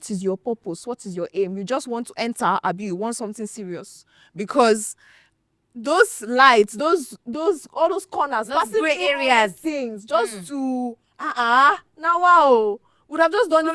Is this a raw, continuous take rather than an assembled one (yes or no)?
yes